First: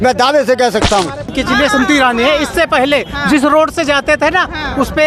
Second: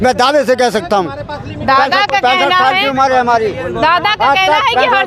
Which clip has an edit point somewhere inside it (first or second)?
first